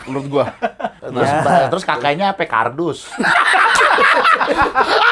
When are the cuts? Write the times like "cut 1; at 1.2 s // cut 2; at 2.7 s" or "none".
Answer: cut 1; at 1.0 s